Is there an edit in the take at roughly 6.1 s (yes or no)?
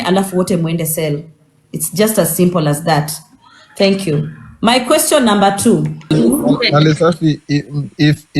yes